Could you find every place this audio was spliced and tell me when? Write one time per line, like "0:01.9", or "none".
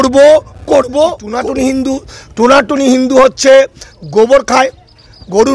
0:01.4